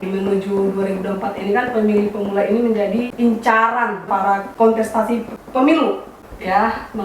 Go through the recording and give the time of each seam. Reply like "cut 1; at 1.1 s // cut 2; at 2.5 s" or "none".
cut 1; at 4.1 s